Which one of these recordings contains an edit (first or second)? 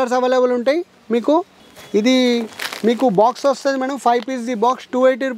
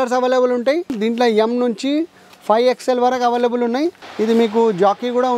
second